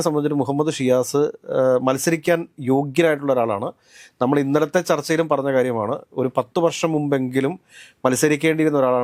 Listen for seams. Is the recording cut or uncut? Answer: uncut